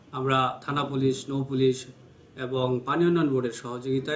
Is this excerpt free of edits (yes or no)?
yes